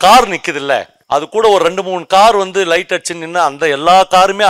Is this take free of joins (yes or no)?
no